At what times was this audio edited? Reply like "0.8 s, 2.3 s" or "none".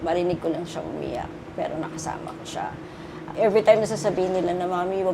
3.3 s